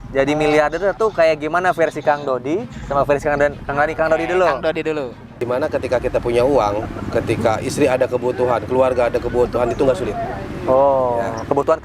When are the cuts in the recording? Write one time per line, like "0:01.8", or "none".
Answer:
0:05.5